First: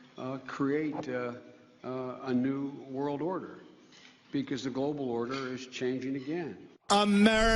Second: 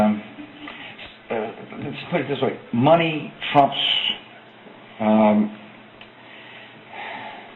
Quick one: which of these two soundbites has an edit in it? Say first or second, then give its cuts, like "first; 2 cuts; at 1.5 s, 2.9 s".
first; 1 cut; at 3.7 s